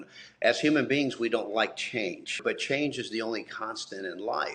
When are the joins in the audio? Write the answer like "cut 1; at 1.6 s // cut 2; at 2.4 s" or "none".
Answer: cut 1; at 2.4 s